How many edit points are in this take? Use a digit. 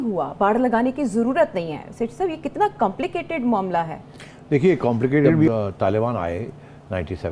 0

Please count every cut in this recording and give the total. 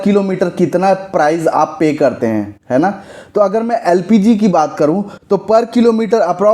0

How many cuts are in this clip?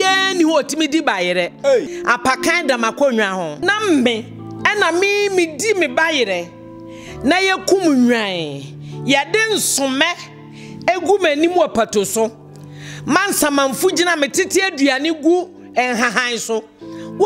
2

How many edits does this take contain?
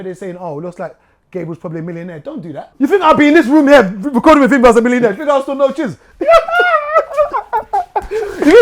1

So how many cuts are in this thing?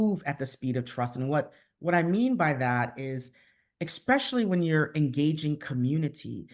0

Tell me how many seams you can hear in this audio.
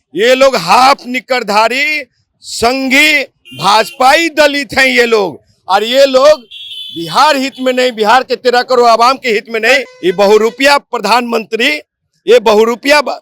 1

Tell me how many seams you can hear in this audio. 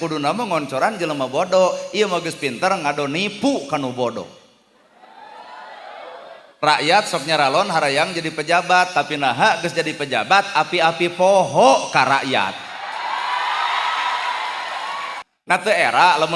1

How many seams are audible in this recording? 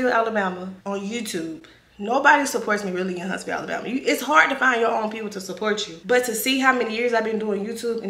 0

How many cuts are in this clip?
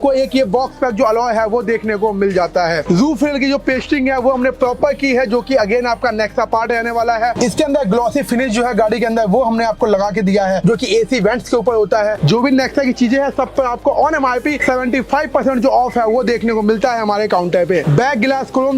4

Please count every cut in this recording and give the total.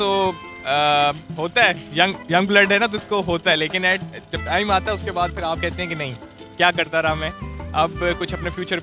0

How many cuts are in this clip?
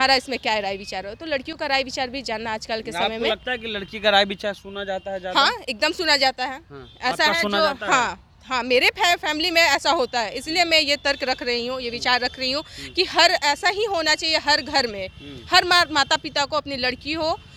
0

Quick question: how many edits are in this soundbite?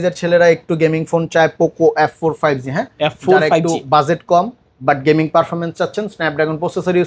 0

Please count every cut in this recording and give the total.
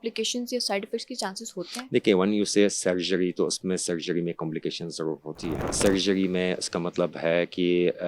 1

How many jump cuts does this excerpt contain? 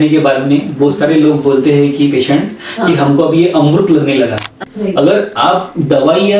1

